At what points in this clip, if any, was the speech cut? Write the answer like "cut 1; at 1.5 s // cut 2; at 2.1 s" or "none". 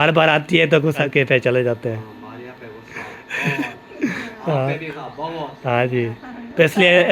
cut 1; at 1.1 s // cut 2; at 5.0 s